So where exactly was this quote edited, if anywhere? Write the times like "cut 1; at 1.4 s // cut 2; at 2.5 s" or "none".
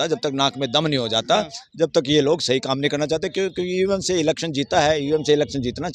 none